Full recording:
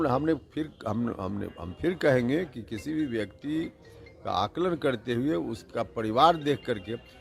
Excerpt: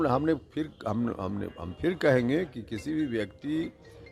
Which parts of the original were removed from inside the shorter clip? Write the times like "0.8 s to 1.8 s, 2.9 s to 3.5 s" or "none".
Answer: none